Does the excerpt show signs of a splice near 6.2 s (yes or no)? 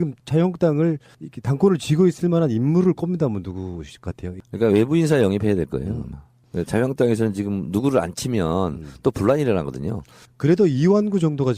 no